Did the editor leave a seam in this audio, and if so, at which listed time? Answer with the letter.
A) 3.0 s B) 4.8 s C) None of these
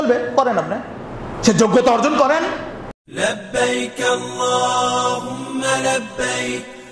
A